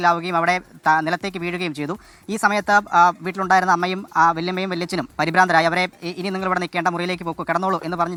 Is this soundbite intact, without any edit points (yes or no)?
yes